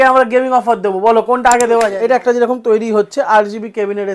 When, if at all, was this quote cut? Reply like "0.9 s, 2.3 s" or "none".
1.9 s